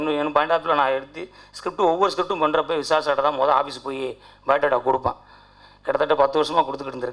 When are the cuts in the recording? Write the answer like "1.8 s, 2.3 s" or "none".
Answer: none